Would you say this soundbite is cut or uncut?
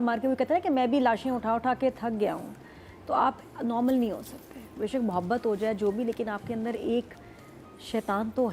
uncut